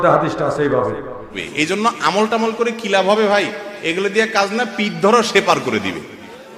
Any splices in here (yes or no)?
yes